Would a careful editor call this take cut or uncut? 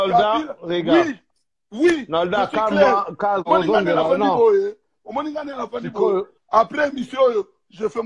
cut